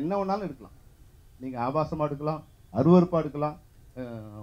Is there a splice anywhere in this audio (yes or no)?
no